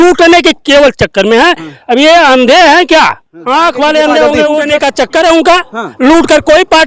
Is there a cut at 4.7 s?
yes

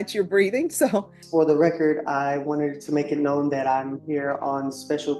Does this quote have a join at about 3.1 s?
no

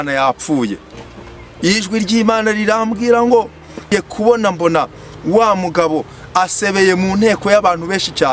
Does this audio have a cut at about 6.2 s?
no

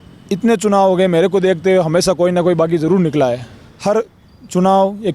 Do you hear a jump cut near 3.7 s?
yes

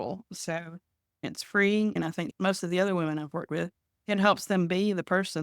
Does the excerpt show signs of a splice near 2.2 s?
yes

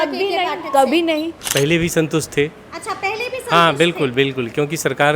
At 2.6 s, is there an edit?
no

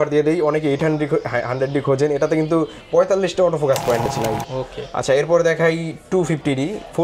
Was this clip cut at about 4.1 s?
yes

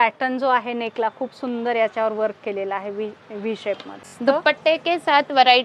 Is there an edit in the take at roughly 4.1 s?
yes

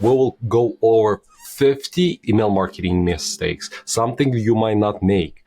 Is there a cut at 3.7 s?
no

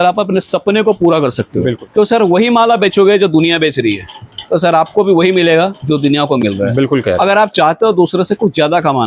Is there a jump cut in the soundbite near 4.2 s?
no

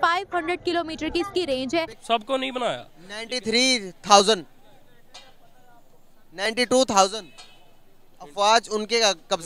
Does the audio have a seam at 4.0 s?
no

